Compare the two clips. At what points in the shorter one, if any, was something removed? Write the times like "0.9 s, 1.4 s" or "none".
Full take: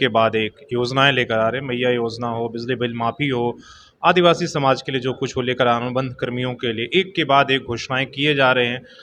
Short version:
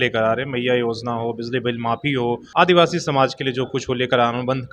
2.4 s